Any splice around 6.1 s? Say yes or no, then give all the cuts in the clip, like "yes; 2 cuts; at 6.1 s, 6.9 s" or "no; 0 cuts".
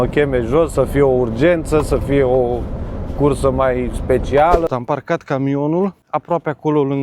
yes; 2 cuts; at 4.7 s, 6.1 s